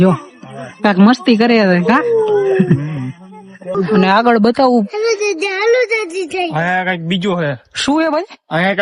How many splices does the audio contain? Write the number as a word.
zero